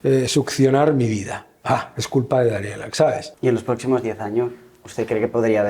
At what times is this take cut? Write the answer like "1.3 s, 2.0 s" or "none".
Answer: 3.3 s